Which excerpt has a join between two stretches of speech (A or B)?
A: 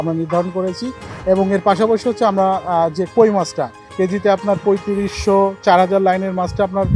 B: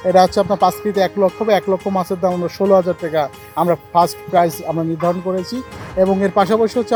A